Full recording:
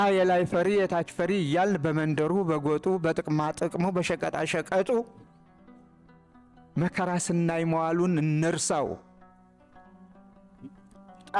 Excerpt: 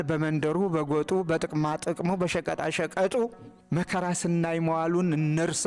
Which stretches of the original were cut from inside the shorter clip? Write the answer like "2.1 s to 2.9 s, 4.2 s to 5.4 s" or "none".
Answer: 5.2 s to 6.5 s